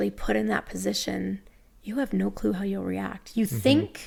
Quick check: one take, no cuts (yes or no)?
yes